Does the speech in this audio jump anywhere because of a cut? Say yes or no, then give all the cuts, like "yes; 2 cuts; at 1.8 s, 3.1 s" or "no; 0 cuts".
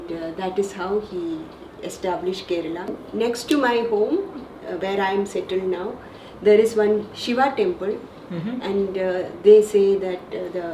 yes; 1 cut; at 3.0 s